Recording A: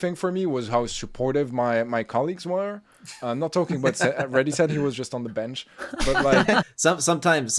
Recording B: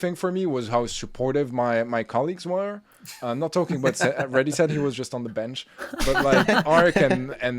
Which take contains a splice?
A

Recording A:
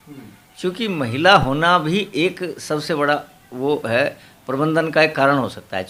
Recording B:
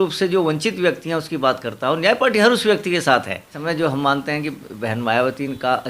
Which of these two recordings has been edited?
B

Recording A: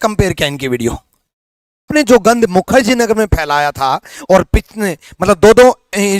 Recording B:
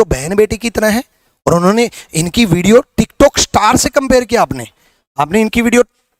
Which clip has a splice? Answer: A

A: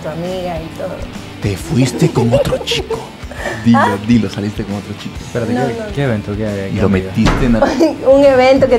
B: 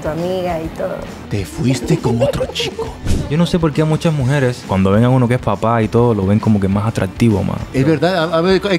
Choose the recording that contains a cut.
B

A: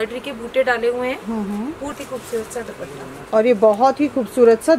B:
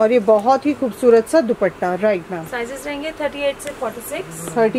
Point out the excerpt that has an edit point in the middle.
A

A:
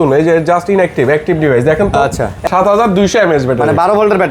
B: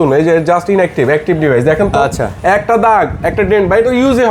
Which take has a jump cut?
A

